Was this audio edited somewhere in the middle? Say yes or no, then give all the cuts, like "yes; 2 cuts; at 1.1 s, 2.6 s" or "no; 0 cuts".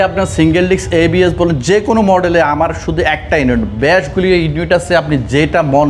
no; 0 cuts